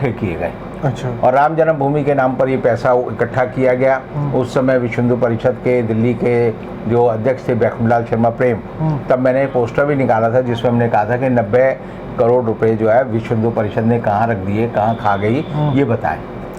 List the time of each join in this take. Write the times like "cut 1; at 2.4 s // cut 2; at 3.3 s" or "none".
none